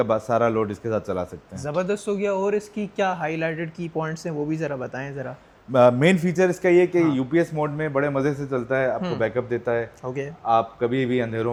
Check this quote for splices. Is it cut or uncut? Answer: uncut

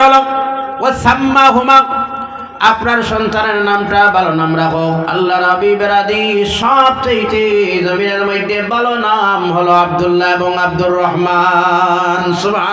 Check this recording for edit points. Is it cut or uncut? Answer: uncut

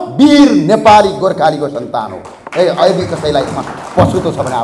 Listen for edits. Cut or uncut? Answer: uncut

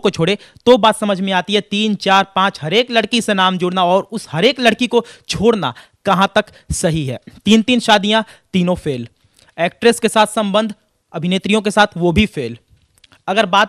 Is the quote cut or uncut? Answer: uncut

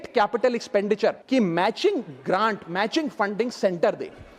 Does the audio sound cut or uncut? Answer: cut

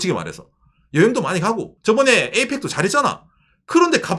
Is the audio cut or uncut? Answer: cut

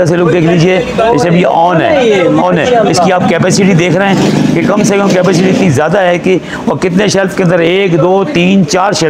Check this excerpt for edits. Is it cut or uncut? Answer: uncut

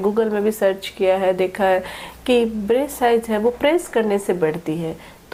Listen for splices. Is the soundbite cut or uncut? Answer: uncut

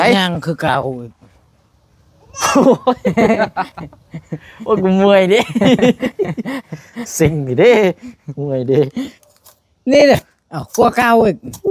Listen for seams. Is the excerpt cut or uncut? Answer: uncut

